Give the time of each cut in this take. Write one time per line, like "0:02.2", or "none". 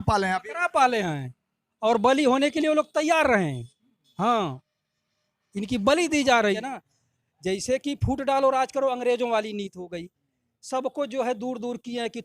0:06.6